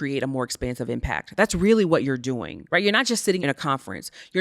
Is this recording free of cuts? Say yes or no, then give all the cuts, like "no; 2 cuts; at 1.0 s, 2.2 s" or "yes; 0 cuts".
no; 2 cuts; at 2.5 s, 3.4 s